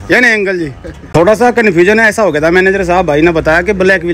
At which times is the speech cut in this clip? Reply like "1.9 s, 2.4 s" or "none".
1.0 s